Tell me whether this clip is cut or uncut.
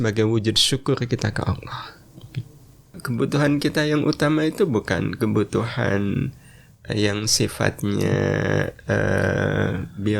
cut